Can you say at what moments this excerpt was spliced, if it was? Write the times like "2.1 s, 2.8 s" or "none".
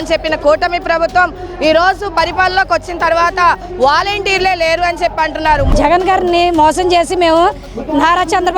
5.7 s